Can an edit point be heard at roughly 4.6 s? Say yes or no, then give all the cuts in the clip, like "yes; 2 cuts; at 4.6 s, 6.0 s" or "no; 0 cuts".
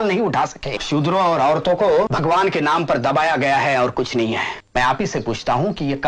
yes; 3 cuts; at 0.8 s, 2.1 s, 4.6 s